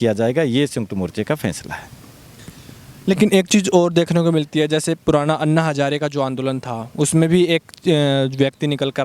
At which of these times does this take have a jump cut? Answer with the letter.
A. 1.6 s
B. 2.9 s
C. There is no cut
C